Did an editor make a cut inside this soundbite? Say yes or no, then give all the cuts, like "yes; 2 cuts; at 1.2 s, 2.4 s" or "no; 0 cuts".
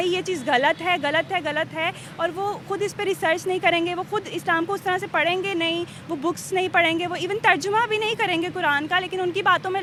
no; 0 cuts